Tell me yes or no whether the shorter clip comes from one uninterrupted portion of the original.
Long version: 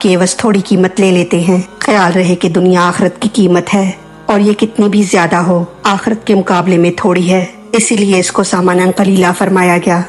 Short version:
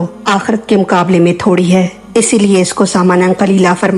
yes